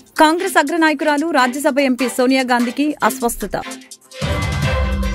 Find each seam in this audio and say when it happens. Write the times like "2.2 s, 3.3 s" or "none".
none